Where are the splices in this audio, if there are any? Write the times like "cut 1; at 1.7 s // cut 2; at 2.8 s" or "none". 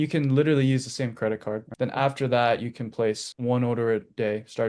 cut 1; at 1.7 s